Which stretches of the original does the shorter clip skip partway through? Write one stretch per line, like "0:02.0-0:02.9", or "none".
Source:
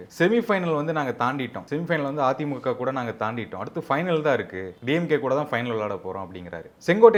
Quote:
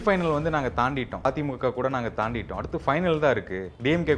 0:01.7-0:02.3